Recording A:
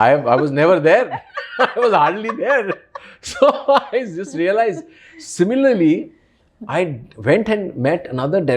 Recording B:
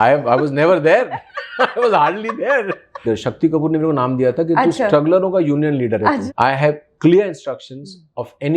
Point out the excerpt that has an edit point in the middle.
B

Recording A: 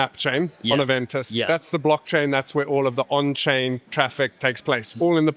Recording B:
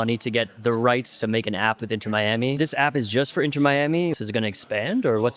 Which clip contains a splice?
B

